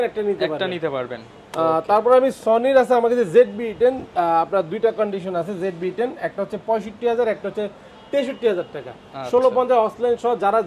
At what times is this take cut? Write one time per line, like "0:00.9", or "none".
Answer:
none